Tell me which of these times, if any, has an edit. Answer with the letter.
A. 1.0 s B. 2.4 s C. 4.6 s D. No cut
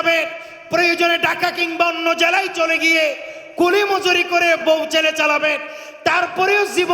C